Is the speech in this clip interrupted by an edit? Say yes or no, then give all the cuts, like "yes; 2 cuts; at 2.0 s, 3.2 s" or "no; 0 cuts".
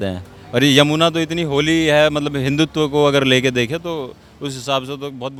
no; 0 cuts